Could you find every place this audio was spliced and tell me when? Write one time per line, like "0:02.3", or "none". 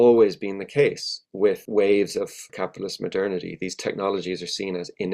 0:01.6
0:02.5